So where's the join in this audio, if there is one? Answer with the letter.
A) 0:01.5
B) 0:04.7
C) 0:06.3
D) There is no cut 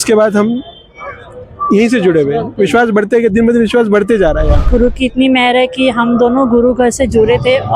B